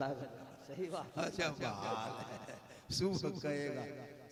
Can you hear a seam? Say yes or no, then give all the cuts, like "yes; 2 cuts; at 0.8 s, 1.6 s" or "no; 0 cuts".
no; 0 cuts